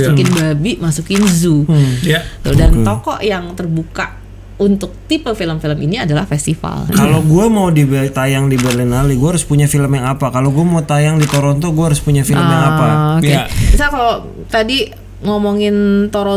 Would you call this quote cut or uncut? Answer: cut